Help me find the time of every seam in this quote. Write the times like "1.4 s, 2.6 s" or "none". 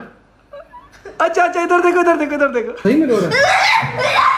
2.7 s